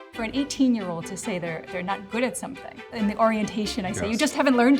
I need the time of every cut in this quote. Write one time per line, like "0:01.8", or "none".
0:02.8